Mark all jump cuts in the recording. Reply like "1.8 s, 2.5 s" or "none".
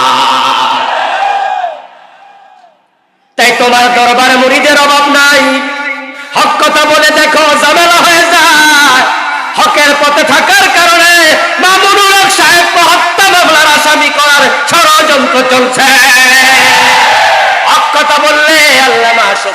none